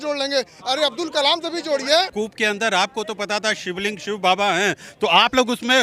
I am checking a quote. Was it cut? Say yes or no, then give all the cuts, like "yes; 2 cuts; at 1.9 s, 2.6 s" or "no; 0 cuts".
yes; 1 cut; at 2.1 s